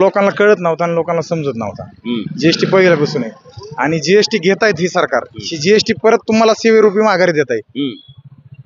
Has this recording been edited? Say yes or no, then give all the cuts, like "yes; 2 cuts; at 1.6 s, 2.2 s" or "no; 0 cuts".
no; 0 cuts